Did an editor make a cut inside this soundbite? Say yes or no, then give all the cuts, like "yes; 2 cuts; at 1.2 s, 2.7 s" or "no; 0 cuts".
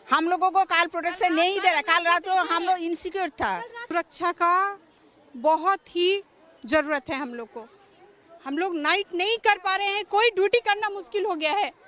no; 0 cuts